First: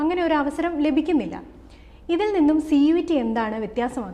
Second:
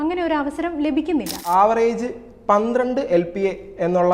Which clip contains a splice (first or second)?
second